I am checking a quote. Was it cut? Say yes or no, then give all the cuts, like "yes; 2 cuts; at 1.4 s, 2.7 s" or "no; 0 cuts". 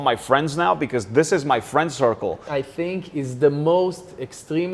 yes; 1 cut; at 2.4 s